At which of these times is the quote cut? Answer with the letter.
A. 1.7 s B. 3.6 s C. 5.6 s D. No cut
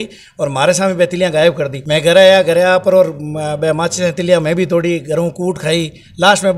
A